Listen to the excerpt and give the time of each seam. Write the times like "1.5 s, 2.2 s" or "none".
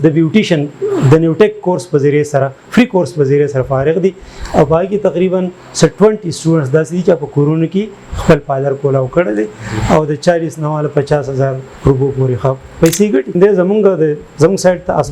13.4 s